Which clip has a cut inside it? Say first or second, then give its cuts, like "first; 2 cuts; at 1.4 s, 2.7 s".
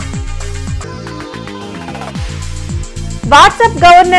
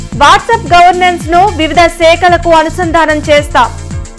first; 2 cuts; at 0.8 s, 2.0 s